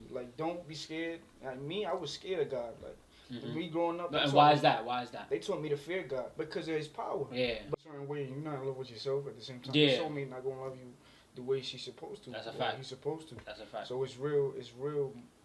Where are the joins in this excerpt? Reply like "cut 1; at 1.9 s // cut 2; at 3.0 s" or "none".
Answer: cut 1; at 7.7 s

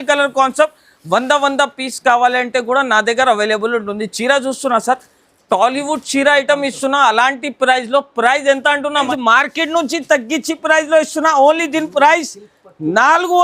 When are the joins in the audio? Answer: cut 1; at 9.1 s

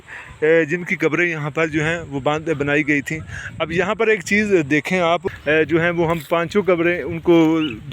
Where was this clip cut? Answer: cut 1; at 5.3 s

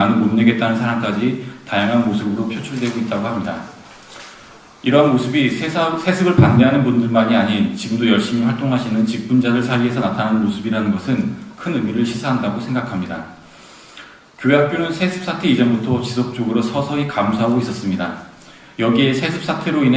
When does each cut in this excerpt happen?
cut 1; at 8.6 s

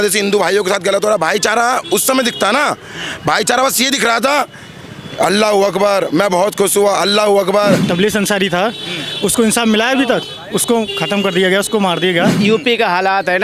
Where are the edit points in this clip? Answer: cut 1; at 7.8 s // cut 2; at 12.4 s

